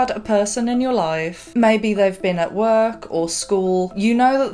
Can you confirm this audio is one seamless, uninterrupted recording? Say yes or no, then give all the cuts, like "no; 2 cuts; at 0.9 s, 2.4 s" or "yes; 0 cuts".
yes; 0 cuts